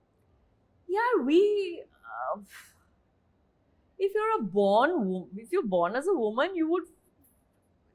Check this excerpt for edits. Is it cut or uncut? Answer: uncut